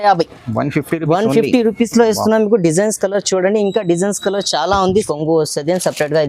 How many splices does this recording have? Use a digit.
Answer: 1